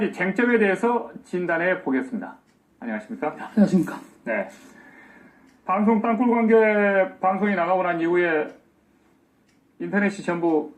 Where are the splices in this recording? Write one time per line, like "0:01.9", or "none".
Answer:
0:01.0